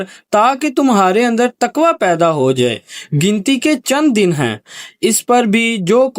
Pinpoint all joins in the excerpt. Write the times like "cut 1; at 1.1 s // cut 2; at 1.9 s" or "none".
cut 1; at 2.9 s